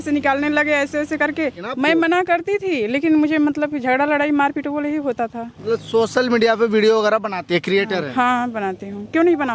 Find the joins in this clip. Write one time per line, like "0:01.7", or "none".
0:01.6
0:05.5